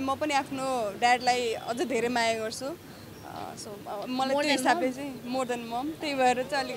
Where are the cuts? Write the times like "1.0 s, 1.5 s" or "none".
none